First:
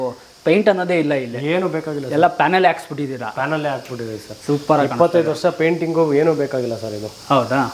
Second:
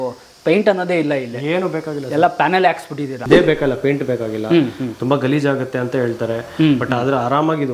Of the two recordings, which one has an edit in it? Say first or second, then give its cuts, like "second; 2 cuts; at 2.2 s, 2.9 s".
second; 1 cut; at 3.3 s